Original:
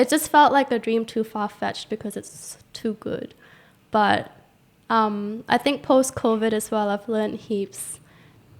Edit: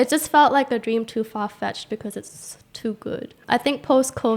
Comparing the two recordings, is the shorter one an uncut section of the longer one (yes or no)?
no